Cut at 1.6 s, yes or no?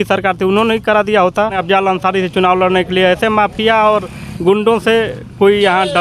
yes